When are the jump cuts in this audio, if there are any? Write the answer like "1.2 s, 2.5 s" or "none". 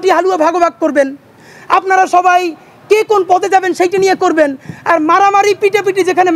none